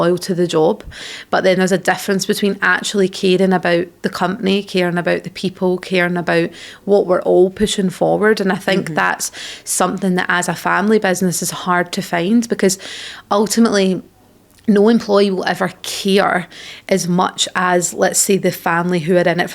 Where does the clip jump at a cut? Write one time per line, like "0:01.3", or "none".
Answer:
none